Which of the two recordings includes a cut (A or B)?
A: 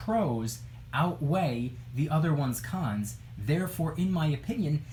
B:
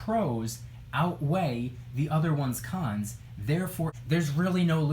B